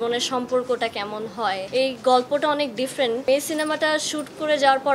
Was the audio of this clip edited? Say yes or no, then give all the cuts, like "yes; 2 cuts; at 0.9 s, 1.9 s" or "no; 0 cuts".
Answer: yes; 2 cuts; at 1.6 s, 3.2 s